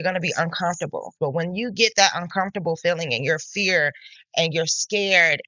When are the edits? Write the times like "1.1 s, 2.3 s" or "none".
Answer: 1.1 s